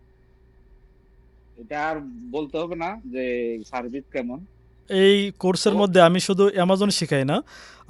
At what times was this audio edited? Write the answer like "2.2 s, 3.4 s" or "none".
4.8 s